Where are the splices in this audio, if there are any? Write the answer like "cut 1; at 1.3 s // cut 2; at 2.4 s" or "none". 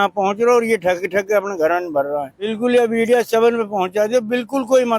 cut 1; at 2.5 s